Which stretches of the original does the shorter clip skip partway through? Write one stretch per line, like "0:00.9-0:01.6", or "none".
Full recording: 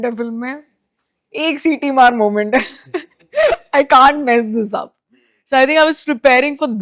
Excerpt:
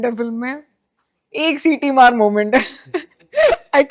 none